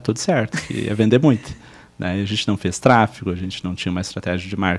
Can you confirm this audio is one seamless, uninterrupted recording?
yes; 0 cuts

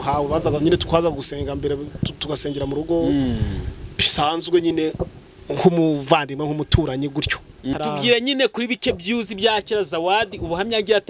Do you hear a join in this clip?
yes; 1 cut; at 7.7 s

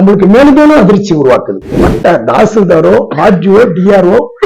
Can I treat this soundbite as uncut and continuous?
no; 1 cut; at 1.7 s

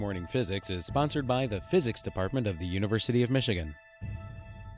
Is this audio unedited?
no; 1 cut; at 3.9 s

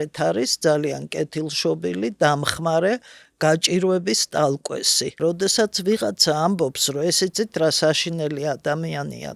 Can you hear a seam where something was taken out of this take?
yes; 1 cut; at 5.2 s

